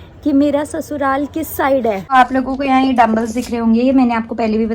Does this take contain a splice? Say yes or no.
yes